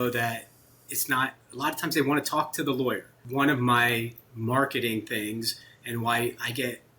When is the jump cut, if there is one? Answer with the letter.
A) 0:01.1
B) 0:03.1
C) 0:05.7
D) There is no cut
B